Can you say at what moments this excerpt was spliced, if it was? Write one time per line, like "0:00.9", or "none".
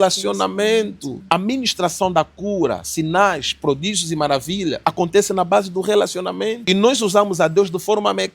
0:01.1
0:04.8
0:06.6